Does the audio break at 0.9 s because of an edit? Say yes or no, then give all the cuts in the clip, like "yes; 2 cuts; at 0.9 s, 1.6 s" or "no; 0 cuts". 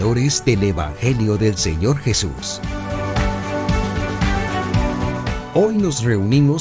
no; 2 cuts; at 2.4 s, 5.4 s